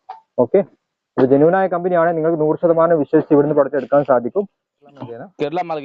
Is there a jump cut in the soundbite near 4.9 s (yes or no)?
yes